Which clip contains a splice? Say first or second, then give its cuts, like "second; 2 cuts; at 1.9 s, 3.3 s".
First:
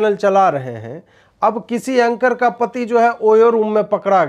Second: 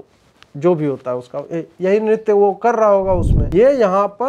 second; 1 cut; at 3.4 s